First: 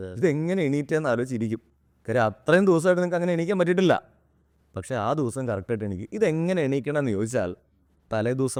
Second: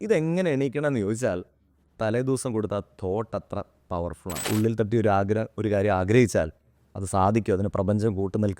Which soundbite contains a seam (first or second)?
second